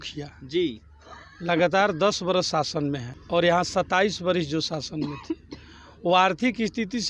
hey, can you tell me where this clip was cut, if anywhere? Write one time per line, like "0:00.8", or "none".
0:03.1